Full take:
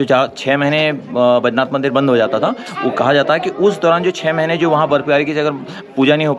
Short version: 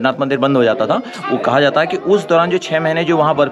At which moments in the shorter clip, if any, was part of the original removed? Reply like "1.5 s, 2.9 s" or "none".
none